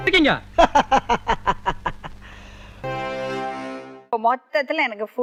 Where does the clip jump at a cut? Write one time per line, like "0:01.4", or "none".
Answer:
none